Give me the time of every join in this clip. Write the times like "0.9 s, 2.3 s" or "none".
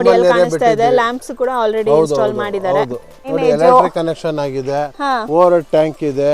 3.2 s